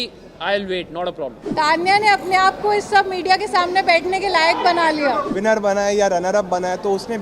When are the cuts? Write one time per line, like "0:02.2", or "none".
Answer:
0:01.4
0:05.3